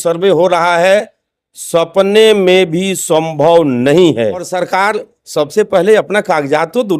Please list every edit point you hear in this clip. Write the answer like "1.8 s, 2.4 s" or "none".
4.6 s